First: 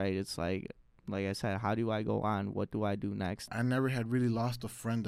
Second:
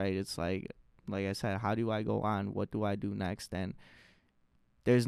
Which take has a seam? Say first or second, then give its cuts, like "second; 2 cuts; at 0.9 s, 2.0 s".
first; 1 cut; at 3.5 s